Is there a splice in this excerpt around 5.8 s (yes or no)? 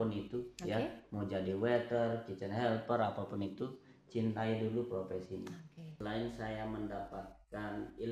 yes